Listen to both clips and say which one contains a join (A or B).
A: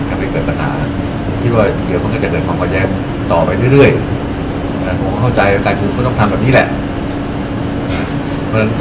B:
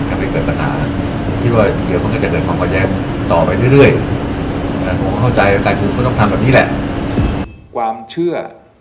B